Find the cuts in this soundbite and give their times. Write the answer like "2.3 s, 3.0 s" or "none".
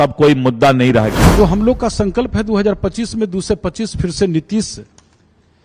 1.2 s